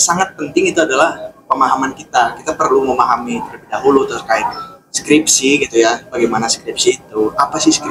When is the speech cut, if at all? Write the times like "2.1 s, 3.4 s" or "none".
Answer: none